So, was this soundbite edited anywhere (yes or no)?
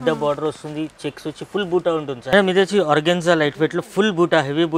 yes